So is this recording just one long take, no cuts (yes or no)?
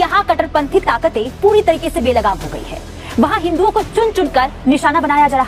yes